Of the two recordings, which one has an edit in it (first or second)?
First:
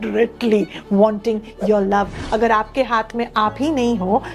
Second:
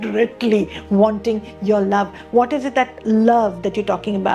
first